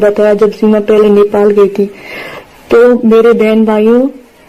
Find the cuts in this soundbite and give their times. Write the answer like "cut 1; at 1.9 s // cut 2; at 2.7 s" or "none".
none